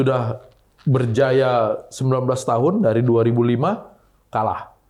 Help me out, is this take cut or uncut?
uncut